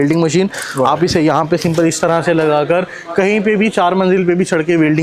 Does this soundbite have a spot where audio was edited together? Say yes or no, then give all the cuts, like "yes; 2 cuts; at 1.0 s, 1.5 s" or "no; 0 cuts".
no; 0 cuts